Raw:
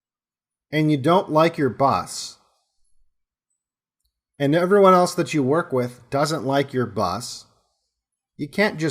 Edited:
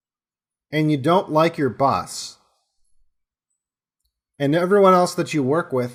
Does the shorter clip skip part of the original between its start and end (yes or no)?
no